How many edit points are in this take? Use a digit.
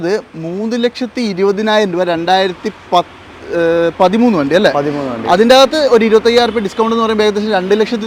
0